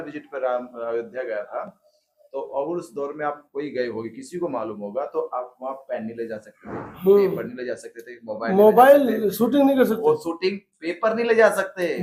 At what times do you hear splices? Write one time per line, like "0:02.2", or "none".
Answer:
none